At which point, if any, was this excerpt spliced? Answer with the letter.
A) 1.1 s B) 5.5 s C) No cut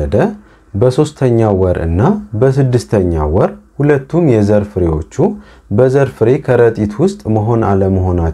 C